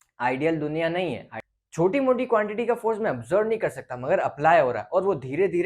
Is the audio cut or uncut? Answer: cut